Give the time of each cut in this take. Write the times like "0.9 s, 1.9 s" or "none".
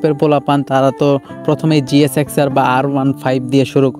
none